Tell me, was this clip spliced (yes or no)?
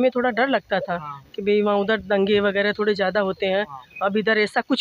no